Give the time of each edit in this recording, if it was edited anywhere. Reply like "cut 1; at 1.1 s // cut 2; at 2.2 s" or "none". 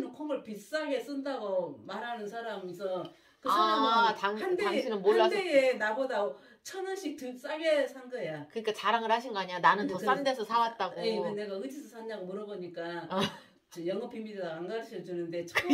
none